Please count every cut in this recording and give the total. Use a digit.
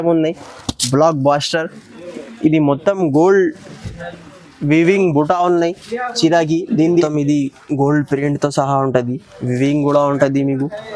1